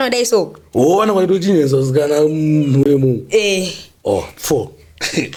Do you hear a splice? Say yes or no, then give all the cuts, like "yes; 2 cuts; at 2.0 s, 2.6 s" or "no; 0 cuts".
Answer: no; 0 cuts